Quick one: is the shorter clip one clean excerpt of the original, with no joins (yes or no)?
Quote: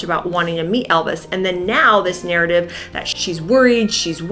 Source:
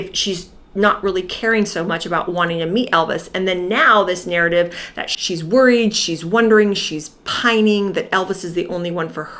yes